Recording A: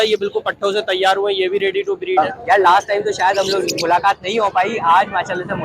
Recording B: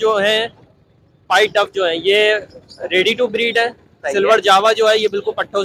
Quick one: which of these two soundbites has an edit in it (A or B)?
A